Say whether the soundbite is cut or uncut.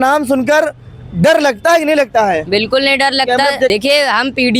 cut